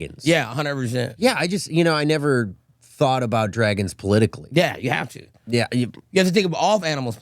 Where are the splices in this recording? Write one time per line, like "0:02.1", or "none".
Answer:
0:01.1
0:04.4